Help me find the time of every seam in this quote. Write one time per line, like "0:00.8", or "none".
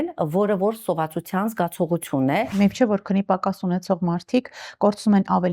0:02.5